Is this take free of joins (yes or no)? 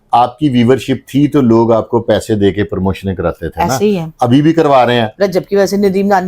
no